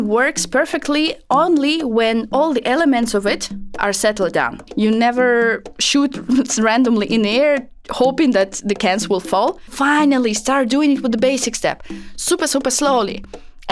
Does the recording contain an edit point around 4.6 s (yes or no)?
yes